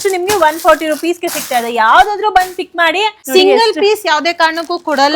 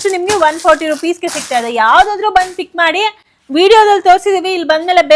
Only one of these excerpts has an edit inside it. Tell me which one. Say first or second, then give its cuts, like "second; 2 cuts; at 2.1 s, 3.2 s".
first; 1 cut; at 3.2 s